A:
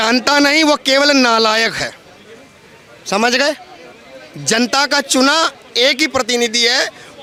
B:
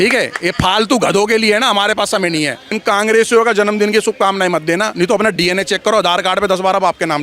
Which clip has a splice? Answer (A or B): B